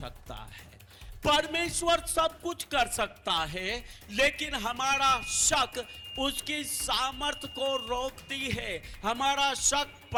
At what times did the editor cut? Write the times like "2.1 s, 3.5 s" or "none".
none